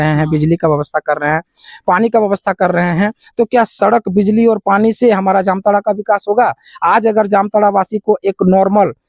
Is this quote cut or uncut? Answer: uncut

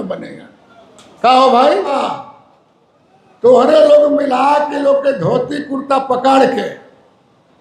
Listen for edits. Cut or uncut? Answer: cut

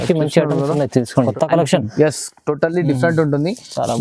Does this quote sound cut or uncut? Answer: cut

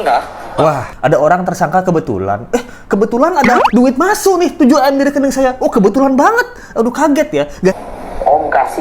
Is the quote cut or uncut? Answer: cut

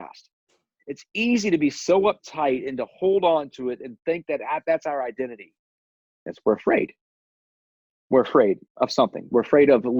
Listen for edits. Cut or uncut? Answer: cut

